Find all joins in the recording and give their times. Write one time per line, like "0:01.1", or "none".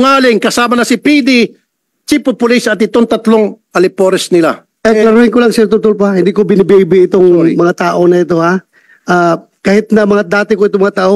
0:04.7